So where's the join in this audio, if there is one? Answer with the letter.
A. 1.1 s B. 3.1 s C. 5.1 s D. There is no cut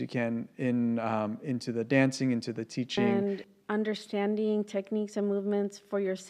B